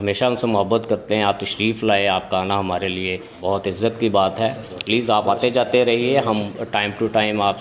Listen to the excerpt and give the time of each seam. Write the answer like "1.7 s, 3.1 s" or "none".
3.4 s